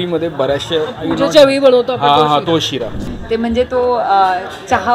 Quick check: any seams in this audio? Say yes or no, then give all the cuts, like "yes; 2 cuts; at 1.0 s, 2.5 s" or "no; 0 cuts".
yes; 1 cut; at 3.1 s